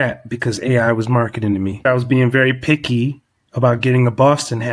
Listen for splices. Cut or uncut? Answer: cut